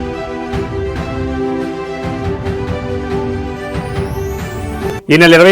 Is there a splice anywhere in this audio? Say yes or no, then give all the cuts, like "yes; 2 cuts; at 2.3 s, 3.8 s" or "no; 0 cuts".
yes; 1 cut; at 4.4 s